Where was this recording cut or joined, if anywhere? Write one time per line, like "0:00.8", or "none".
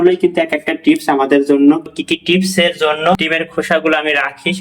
0:01.8
0:03.1